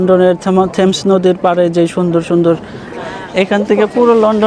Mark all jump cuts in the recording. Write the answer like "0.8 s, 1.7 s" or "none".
3.0 s